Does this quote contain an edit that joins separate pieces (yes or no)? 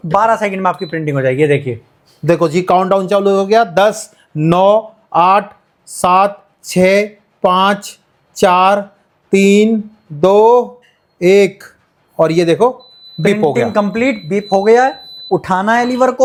no